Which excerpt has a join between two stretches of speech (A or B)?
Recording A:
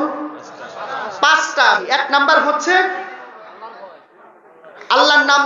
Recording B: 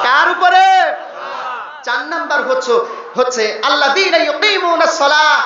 A